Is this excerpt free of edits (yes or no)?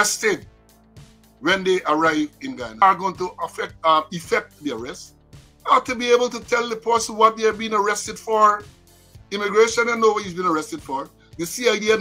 no